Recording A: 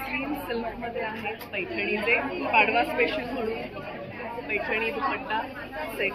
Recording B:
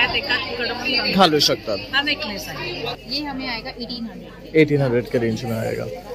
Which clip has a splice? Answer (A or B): B